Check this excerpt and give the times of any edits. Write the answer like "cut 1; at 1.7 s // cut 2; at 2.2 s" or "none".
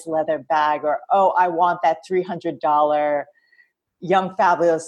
none

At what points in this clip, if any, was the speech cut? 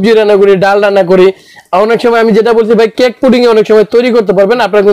none

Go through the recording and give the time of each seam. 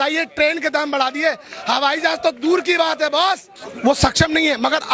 cut 1; at 3.7 s

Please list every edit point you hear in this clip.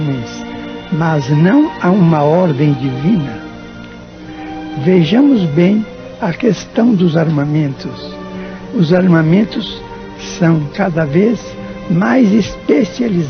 cut 1; at 4.9 s

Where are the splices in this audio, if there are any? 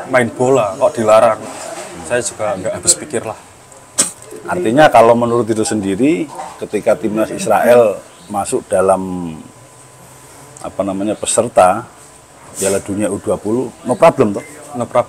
none

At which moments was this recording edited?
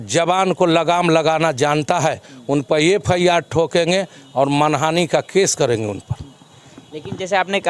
none

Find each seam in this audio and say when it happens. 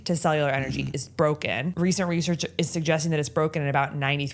cut 1; at 1.7 s

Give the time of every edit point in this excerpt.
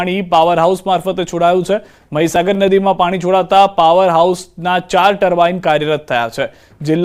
cut 1; at 1.3 s

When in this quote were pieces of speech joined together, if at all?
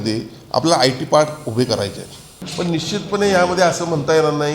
cut 1; at 2.3 s

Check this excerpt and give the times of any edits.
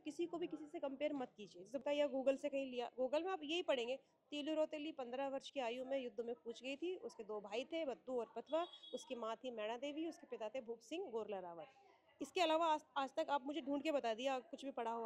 cut 1; at 1.8 s

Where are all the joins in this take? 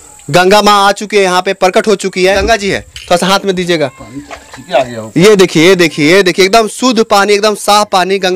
cut 1; at 2.4 s

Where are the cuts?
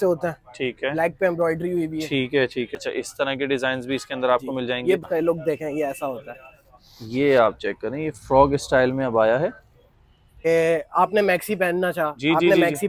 cut 1; at 2.8 s // cut 2; at 5.0 s // cut 3; at 10.4 s

